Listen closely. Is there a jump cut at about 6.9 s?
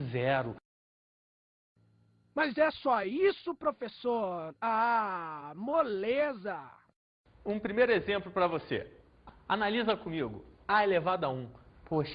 no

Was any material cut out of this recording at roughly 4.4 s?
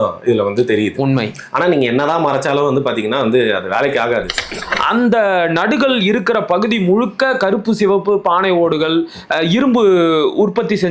yes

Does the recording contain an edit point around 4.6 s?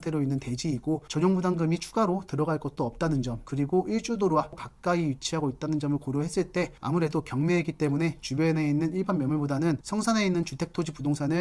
yes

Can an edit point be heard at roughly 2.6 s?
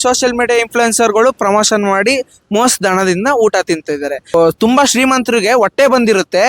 no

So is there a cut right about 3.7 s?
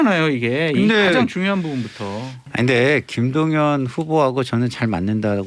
no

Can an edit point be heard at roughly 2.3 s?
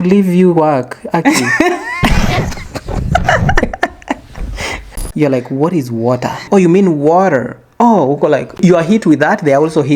no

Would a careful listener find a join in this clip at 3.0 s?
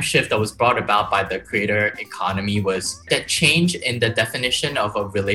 yes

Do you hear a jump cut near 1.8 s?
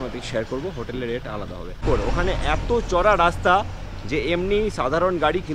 yes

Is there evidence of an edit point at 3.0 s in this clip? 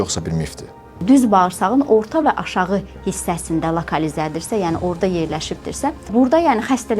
no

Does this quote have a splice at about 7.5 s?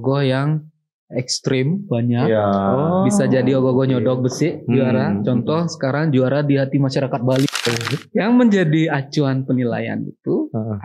yes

